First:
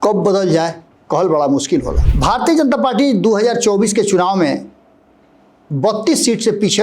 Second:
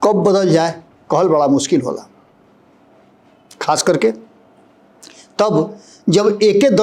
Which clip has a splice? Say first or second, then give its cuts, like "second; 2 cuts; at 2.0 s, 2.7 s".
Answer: first; 1 cut; at 2.0 s